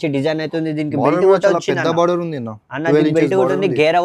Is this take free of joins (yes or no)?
yes